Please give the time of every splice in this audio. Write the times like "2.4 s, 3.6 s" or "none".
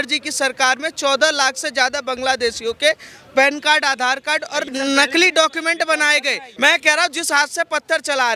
4.7 s, 6.5 s